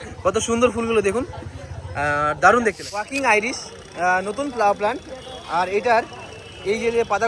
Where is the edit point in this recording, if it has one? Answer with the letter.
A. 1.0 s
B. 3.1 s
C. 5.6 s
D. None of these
B